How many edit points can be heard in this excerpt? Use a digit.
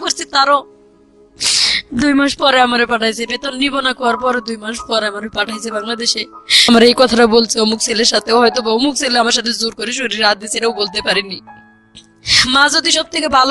1